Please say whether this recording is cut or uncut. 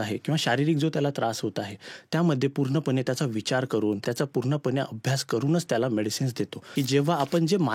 cut